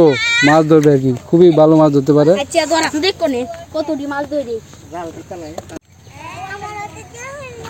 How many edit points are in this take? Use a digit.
0